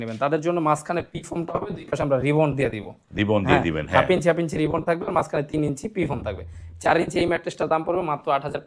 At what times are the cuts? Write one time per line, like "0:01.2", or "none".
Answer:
none